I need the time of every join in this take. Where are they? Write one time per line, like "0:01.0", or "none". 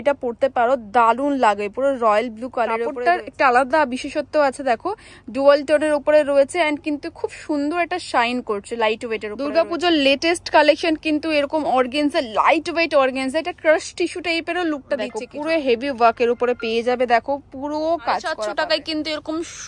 0:02.9
0:09.3
0:15.2
0:18.4